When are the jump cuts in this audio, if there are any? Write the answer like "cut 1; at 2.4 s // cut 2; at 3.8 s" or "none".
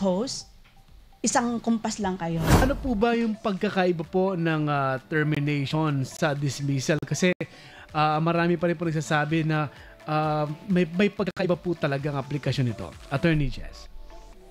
cut 1; at 2.6 s